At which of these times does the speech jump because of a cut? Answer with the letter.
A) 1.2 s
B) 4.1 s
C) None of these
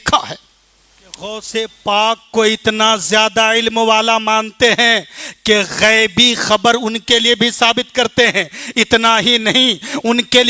A